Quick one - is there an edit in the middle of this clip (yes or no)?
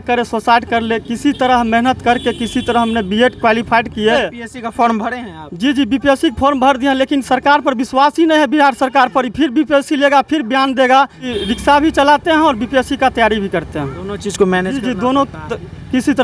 yes